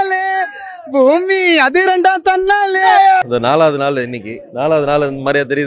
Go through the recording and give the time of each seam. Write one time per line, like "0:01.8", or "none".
0:03.2